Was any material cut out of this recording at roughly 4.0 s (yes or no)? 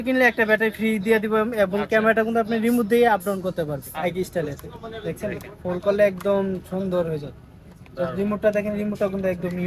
yes